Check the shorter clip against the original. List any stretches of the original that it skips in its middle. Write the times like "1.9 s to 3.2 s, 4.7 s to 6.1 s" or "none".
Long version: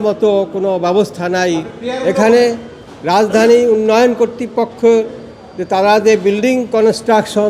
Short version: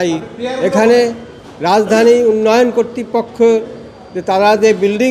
none